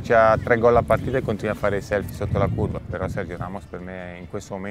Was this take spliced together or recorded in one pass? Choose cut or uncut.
cut